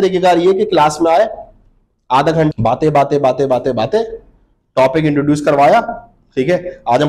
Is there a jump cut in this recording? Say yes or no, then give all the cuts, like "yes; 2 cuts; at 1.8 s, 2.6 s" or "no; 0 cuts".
yes; 1 cut; at 2.5 s